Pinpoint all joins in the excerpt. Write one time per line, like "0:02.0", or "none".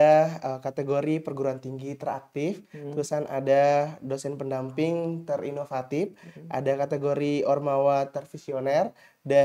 none